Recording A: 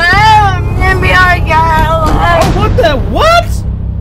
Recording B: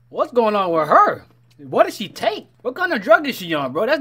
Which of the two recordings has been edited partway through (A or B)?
B